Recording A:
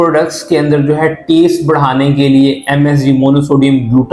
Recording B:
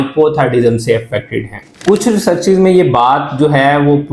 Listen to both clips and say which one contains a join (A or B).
B